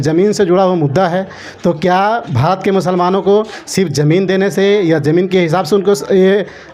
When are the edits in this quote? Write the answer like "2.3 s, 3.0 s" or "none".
none